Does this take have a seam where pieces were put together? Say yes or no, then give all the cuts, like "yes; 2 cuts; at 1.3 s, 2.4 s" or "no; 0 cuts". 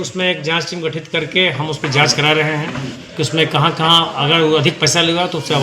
no; 0 cuts